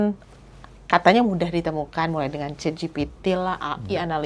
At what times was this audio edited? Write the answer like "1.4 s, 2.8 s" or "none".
none